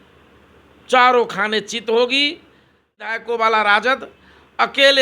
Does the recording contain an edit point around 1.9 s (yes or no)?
no